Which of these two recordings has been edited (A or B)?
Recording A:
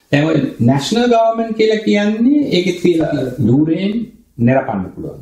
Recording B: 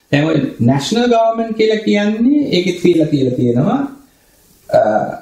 A